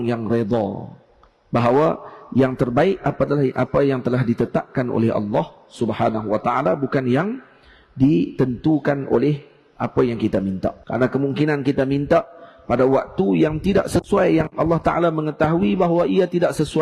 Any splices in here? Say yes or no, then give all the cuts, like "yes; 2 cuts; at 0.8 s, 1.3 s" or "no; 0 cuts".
yes; 1 cut; at 10.8 s